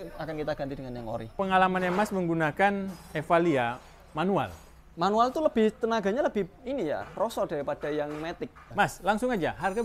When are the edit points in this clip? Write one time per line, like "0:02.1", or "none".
0:01.3
0:08.6